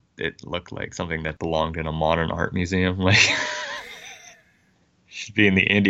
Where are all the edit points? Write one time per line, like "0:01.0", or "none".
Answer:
0:01.4